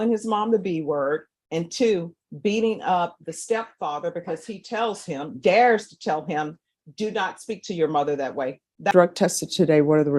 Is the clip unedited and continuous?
no; 1 cut; at 8.9 s

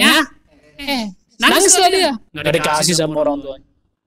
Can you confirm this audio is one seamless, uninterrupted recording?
no; 2 cuts; at 1.2 s, 2.3 s

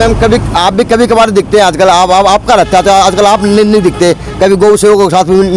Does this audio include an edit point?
no; 0 cuts

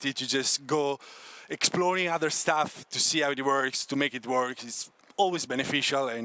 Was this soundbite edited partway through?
no; 0 cuts

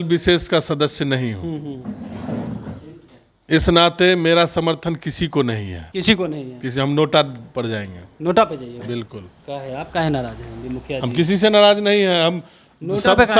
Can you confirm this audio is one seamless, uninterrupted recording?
yes; 0 cuts

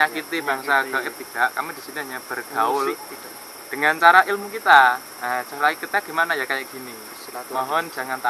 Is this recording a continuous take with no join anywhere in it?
yes; 0 cuts

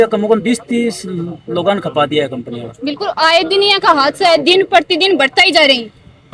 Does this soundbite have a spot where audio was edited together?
no; 0 cuts

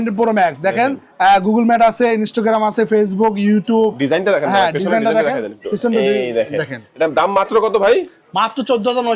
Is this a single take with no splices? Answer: yes; 0 cuts

